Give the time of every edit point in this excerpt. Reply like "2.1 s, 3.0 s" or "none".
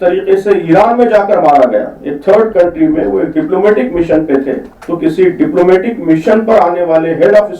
4.7 s